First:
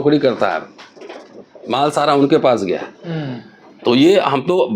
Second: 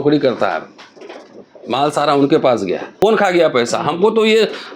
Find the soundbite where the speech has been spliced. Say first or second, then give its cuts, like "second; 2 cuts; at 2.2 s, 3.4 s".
second; 1 cut; at 3.0 s